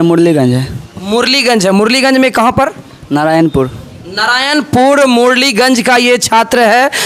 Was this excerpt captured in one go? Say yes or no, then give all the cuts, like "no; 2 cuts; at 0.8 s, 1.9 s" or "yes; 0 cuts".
yes; 0 cuts